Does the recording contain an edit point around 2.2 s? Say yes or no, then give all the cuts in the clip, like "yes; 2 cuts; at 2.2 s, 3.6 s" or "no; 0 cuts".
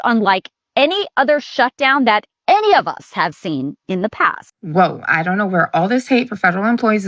no; 1 cut; at 4.4 s